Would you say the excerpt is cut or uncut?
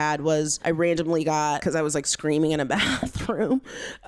cut